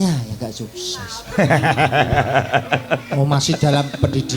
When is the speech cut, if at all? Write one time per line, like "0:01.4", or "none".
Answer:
none